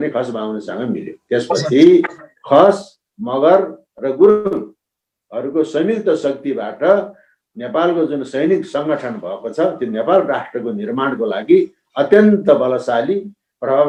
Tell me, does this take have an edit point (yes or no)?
no